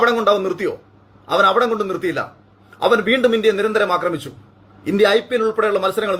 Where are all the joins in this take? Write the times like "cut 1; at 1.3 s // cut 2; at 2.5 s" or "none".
none